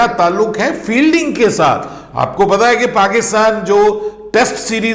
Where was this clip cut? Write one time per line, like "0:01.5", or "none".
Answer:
none

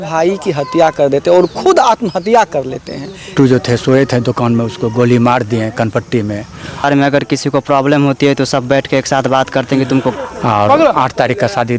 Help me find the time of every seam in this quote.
0:03.3
0:06.8
0:10.1

